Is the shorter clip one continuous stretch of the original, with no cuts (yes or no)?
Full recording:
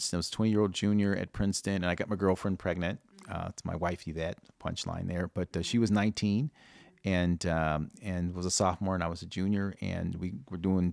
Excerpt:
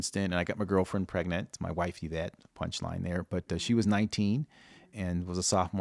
no